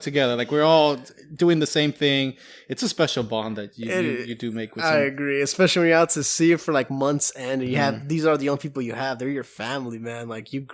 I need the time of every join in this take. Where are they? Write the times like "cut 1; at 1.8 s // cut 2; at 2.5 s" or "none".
none